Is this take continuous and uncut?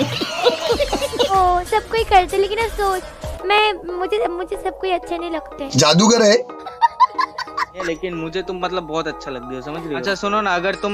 yes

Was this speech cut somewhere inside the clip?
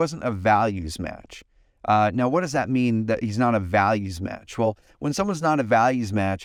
no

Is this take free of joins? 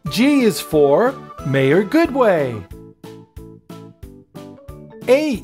no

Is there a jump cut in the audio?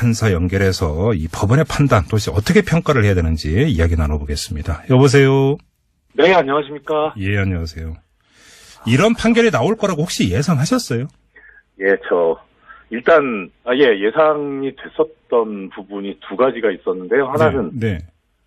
no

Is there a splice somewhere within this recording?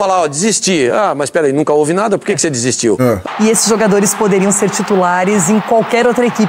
yes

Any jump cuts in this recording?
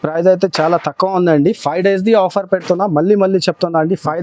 no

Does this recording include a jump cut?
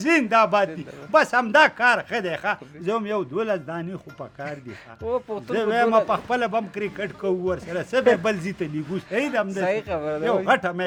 no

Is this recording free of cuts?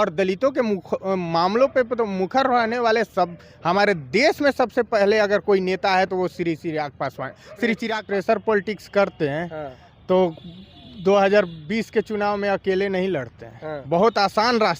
no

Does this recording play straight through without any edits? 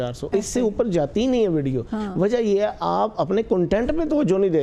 yes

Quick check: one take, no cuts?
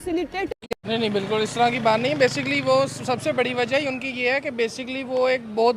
no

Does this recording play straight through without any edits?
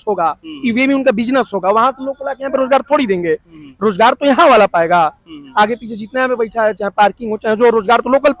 yes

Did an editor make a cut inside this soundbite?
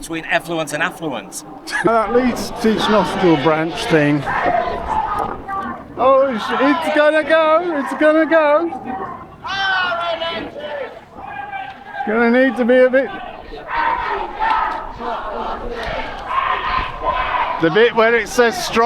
yes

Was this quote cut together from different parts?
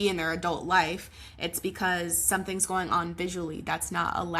no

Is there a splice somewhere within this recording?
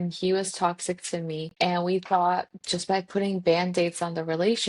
yes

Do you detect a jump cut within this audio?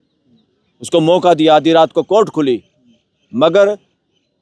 no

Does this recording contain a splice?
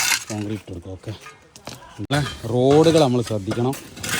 yes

